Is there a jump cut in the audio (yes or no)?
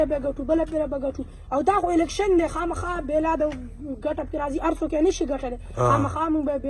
no